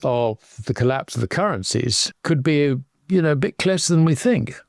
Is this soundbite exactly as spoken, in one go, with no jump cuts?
no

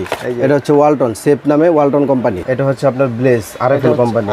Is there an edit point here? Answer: yes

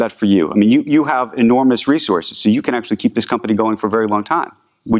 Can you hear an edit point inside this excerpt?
no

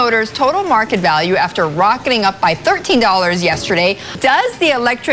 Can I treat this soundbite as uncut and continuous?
no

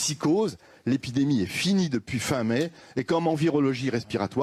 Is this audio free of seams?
yes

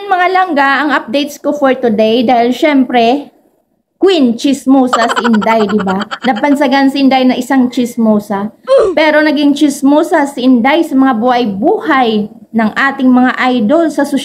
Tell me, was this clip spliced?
no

